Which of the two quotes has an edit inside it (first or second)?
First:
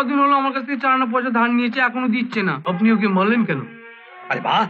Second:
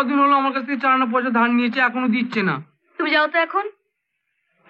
first